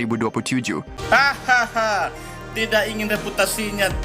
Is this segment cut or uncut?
cut